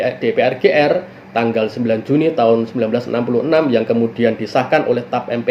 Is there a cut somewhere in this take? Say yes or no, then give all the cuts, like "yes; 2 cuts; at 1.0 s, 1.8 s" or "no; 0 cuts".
no; 0 cuts